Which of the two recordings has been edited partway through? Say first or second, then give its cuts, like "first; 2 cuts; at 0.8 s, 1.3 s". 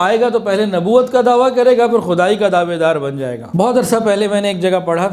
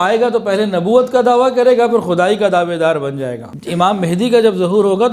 second; 1 cut; at 3.4 s